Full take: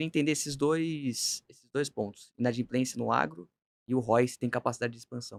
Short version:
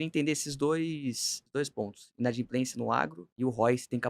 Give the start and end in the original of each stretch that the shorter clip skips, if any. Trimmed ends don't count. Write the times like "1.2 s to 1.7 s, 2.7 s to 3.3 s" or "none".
1.3 s to 1.5 s, 3.4 s to 3.7 s